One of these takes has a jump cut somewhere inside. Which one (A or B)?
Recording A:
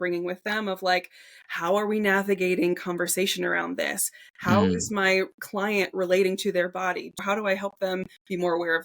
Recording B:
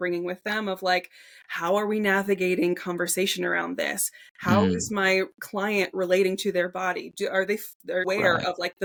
A